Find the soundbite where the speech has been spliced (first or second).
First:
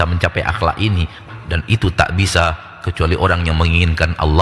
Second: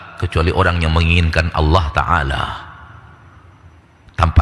first